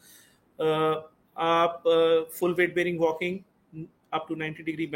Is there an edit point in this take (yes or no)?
no